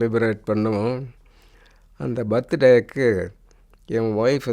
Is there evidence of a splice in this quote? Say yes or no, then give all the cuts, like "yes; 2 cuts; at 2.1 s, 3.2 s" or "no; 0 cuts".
no; 0 cuts